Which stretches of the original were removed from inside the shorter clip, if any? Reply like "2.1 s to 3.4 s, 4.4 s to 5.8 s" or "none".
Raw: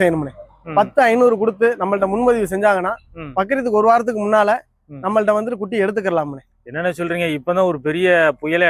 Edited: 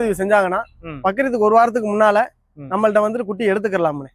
none